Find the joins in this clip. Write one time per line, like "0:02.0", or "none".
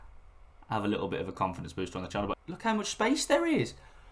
0:02.4